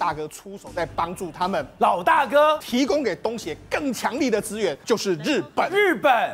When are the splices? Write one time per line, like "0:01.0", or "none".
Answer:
0:02.6
0:04.8

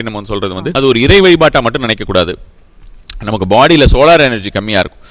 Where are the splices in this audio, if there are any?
none

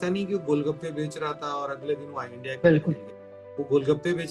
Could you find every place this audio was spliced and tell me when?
none

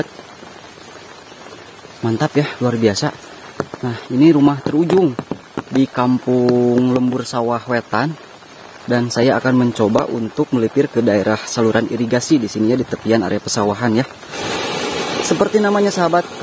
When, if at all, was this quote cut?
0:14.4

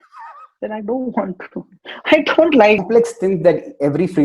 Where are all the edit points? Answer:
0:02.8

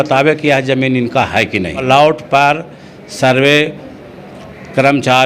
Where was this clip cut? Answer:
0:01.8

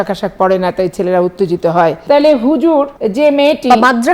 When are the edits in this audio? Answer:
0:02.0
0:03.0

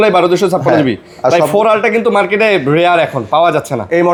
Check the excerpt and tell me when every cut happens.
none

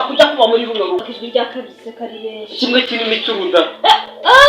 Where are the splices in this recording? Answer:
0:01.2

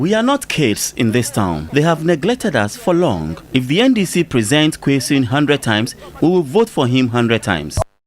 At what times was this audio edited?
0:01.6

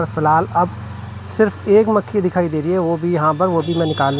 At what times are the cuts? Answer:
none

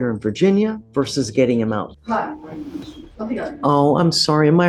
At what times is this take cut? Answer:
0:00.8
0:02.0
0:03.0

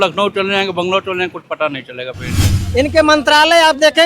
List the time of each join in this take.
0:02.5

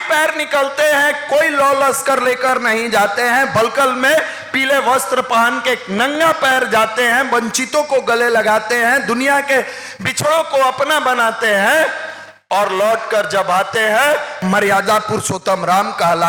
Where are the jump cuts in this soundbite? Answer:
0:14.3

